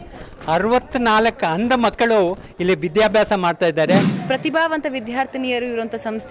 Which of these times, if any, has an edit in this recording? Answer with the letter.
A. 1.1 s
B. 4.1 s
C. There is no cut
B